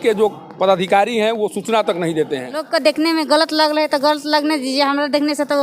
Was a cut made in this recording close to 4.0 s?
no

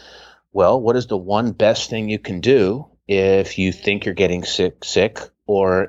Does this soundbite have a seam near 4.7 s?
no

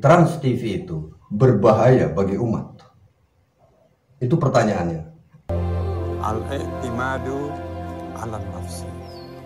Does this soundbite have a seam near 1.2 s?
no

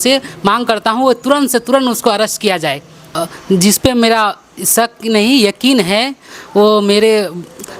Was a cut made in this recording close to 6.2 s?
yes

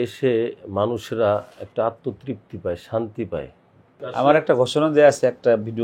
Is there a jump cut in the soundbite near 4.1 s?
yes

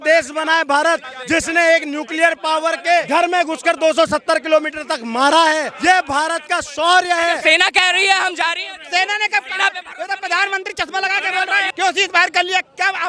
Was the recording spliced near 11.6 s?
yes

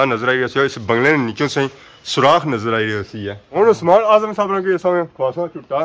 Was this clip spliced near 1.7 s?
no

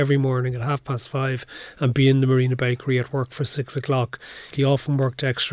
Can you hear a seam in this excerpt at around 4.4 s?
yes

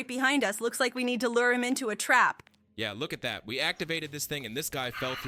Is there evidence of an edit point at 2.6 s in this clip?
no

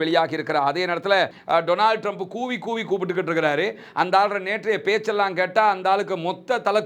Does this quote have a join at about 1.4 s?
yes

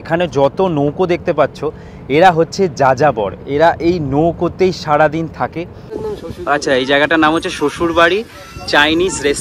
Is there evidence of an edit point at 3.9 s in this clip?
no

